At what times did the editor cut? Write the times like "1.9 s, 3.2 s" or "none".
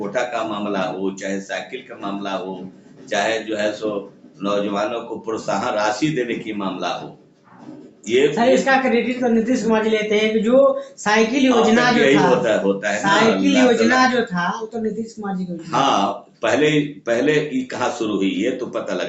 none